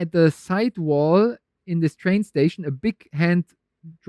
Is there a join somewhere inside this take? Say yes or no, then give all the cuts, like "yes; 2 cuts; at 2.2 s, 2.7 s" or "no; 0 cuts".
no; 0 cuts